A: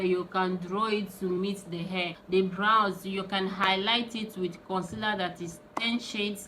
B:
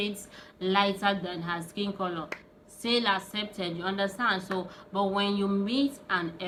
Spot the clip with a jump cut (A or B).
A